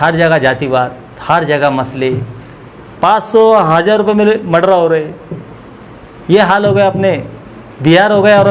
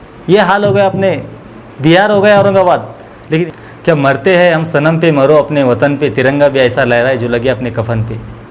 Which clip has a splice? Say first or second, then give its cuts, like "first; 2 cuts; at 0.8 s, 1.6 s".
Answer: second; 1 cut; at 3.4 s